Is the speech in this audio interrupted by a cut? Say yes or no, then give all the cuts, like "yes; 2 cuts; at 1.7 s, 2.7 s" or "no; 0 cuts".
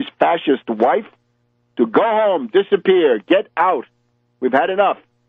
no; 0 cuts